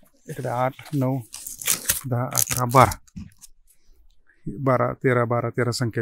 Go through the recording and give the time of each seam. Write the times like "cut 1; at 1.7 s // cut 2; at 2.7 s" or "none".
none